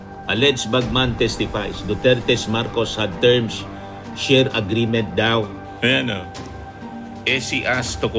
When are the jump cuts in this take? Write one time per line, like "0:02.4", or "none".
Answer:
0:05.7

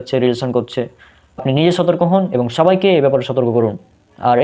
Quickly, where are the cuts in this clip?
0:01.4

